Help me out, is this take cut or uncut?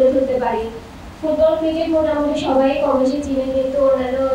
uncut